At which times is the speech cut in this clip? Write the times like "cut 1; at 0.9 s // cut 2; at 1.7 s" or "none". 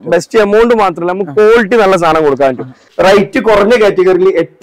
cut 1; at 2.8 s